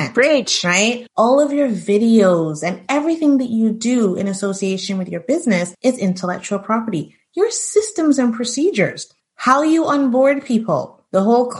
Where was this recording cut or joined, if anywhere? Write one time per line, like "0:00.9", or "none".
none